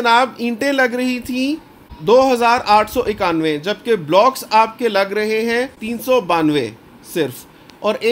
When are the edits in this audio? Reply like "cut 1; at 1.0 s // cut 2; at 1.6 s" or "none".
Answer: none